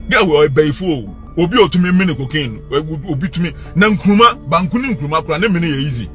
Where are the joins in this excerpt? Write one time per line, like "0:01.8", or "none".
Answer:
0:01.2